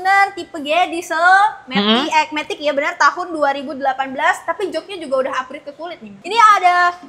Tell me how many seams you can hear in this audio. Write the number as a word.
one